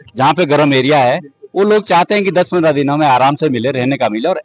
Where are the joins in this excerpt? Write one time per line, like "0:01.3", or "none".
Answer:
none